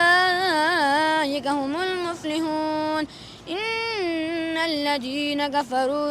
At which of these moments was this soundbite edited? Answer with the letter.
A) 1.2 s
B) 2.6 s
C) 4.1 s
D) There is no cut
D